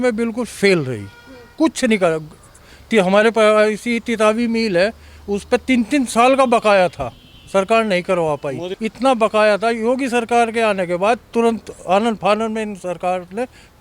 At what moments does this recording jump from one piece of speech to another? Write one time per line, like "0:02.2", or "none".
0:08.7